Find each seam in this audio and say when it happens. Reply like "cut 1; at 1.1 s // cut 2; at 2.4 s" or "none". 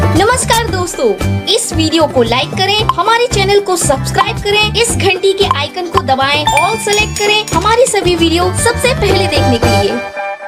none